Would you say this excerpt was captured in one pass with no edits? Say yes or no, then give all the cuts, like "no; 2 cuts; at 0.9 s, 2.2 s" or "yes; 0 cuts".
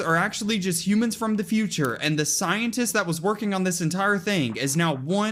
yes; 0 cuts